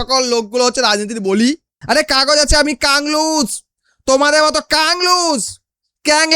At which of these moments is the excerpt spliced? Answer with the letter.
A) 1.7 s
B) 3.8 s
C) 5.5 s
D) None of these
A